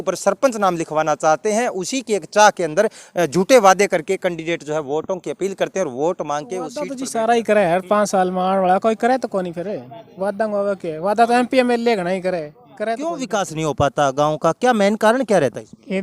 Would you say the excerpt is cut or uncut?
cut